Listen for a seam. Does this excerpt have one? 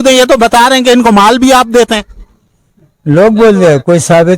no; 0 cuts

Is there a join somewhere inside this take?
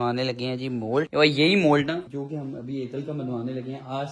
no; 0 cuts

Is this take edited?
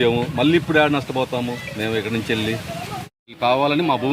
yes; 1 cut; at 3.1 s

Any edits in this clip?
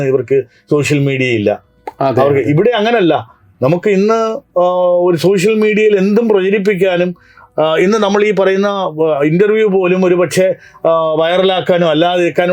no; 0 cuts

